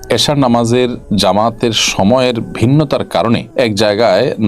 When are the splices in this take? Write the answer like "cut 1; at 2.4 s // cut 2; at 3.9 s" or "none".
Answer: cut 1; at 1.0 s // cut 2; at 3.5 s